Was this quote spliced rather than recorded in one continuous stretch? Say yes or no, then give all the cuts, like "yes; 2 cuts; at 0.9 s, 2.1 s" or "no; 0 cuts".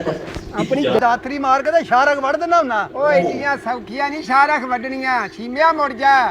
yes; 1 cut; at 1.0 s